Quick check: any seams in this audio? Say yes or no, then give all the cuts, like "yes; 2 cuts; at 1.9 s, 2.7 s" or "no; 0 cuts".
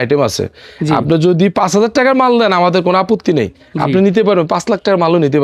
no; 0 cuts